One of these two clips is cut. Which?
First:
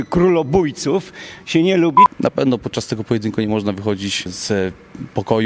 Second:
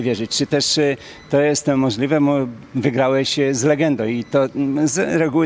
first; 2 cuts; at 2.1 s, 4.4 s

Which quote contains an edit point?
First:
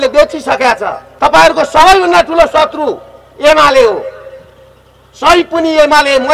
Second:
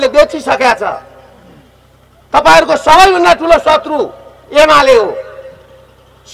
first; 1 cut; at 1.0 s

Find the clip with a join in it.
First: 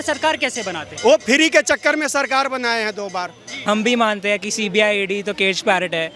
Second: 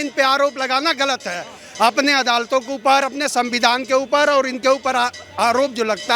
first; 1 cut; at 3.5 s

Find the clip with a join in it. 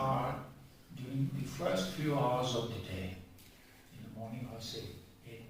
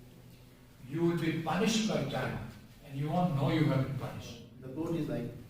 second; 1 cut; at 4.5 s

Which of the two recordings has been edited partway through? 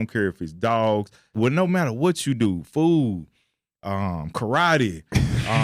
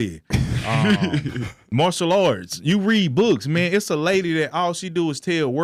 first; 1 cut; at 1.3 s

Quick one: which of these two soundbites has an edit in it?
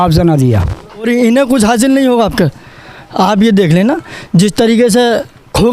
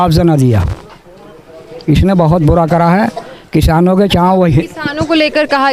first; 1 cut; at 1.1 s

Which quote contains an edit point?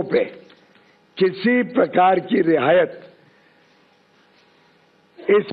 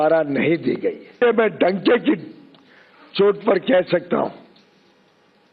second; 1 cut; at 1.2 s

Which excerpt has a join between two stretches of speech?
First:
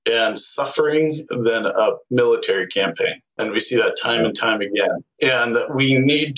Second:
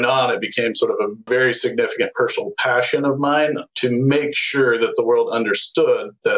second; 1 cut; at 1.3 s

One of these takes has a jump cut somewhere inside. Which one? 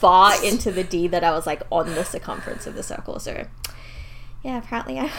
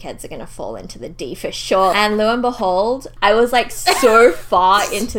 second; 2 cuts; at 1.9 s, 3.1 s

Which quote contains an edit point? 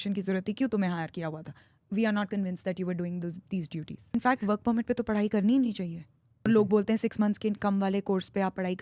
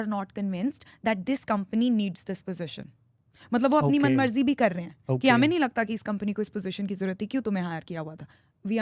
first; 2 cuts; at 4.1 s, 6.5 s

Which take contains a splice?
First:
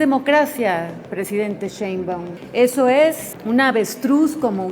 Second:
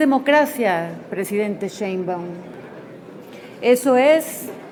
first; 2 cuts; at 2.4 s, 3.3 s

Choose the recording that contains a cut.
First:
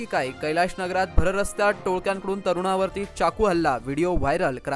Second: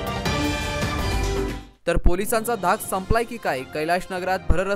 second; 1 cut; at 1.5 s

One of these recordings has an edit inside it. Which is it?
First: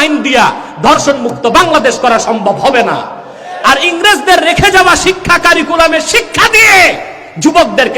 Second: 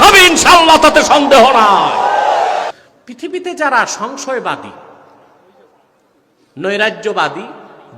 second; 1 cut; at 2.7 s

